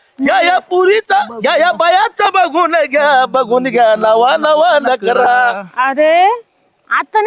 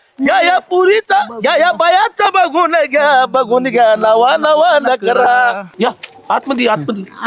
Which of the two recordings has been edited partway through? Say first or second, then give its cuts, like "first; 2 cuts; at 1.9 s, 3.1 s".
second; 1 cut; at 5.6 s